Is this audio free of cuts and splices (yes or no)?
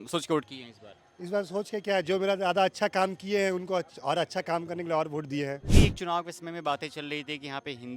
no